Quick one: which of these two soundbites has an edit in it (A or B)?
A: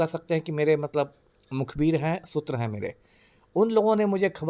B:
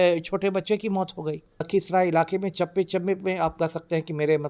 B